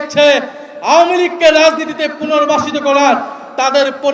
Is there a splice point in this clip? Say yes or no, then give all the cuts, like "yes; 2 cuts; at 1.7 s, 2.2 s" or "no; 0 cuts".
no; 0 cuts